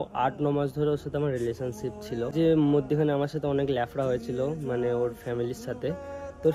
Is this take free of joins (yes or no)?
no